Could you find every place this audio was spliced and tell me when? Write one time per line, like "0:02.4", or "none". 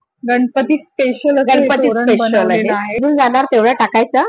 0:03.0